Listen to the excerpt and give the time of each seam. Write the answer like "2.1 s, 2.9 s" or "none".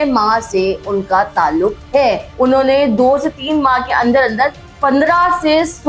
2.3 s